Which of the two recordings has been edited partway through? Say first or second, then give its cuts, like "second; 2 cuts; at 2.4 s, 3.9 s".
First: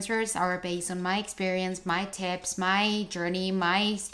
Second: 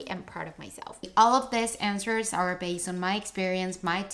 second; 1 cut; at 1.1 s